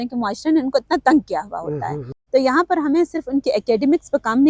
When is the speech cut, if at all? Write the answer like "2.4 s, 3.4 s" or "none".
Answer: 2.1 s